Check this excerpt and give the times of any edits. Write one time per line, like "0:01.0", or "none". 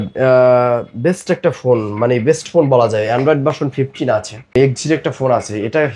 0:04.5